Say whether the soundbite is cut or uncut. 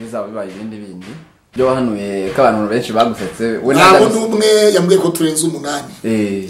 cut